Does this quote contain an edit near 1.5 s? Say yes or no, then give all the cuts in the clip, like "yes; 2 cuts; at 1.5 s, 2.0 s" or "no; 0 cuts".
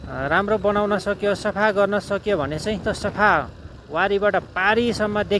no; 1 cut; at 2.8 s